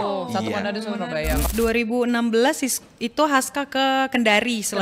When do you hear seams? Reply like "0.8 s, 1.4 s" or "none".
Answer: 1.4 s